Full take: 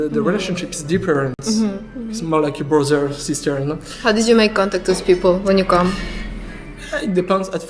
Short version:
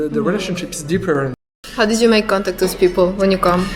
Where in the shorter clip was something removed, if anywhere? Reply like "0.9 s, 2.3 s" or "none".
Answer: 1.4 s